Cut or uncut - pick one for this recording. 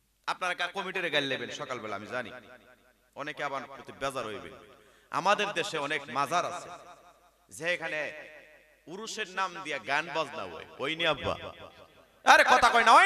uncut